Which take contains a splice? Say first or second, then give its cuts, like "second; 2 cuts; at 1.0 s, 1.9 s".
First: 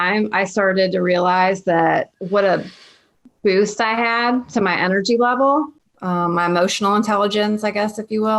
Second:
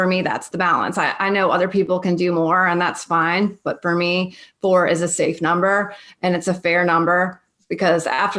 first; 2 cuts; at 2.2 s, 5.8 s